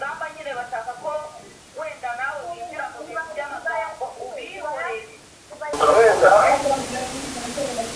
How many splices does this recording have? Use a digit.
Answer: 1